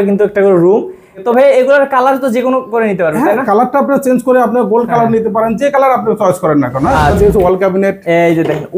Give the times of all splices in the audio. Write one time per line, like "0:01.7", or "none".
0:01.2
0:07.1

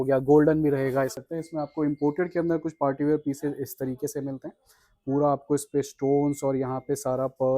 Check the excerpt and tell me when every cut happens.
0:01.2

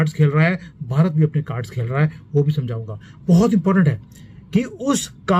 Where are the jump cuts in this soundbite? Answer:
none

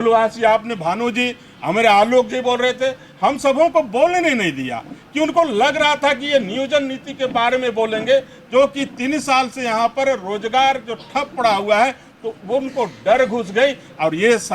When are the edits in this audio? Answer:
none

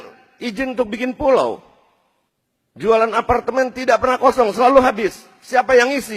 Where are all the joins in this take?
0:02.3

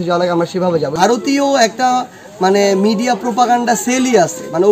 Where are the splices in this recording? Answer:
0:00.9

